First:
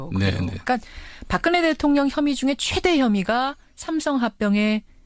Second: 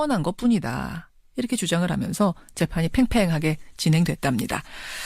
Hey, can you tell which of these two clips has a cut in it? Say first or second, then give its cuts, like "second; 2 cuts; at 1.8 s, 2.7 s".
second; 1 cut; at 1.9 s